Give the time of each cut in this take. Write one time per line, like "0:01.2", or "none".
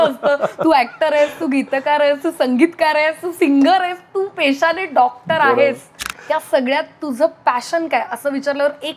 0:06.1